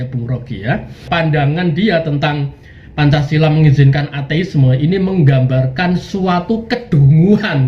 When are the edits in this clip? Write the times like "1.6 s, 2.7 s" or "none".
1.0 s